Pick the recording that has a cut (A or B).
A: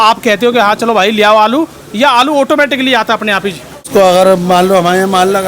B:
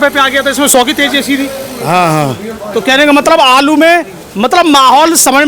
A